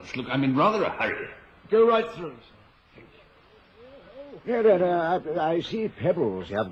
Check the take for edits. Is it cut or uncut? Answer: uncut